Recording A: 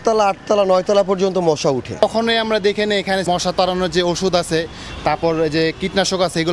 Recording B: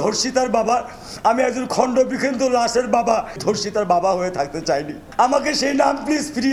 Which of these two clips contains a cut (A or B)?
A